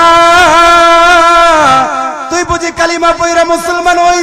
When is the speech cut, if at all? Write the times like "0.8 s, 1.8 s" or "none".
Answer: 2.2 s